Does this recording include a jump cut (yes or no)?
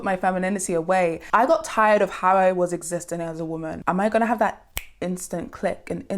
yes